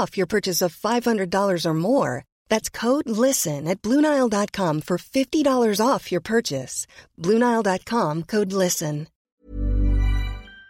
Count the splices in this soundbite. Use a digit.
1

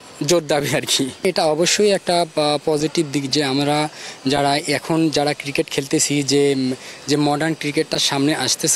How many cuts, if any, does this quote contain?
1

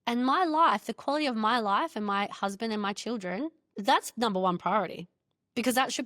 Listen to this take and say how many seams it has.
1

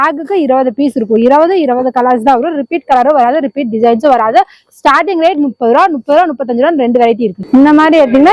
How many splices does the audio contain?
1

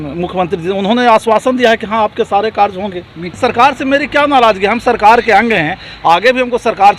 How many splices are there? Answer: 1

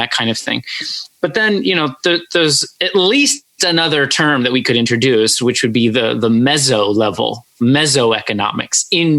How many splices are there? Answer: 0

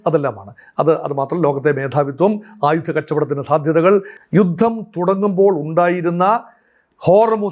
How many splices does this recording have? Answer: 1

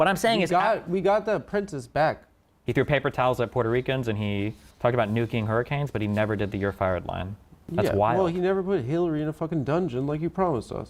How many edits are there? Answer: 1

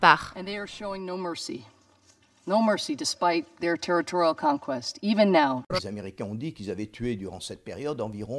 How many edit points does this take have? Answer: 0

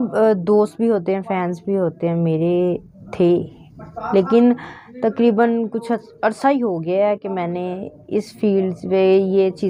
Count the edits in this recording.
0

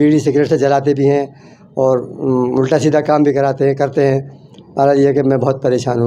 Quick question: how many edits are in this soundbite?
0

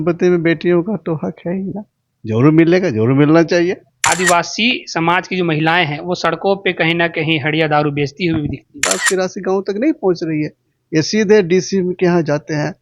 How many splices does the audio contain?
2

